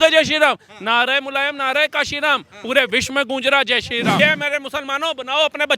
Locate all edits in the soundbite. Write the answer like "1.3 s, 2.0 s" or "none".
4.2 s